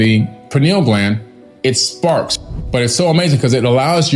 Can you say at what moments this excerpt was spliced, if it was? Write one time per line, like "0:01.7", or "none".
0:02.3